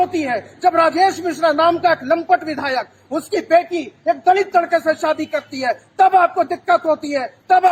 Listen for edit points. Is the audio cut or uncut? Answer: uncut